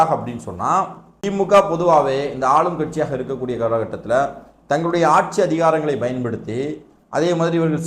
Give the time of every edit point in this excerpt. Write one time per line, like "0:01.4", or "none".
0:01.1